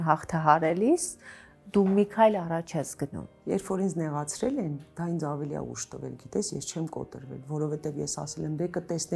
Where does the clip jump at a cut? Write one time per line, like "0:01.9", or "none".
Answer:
0:03.4